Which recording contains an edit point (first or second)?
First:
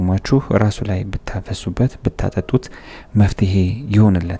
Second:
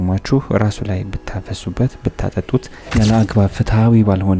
second